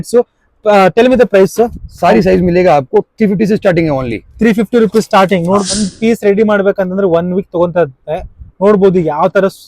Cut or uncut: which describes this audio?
cut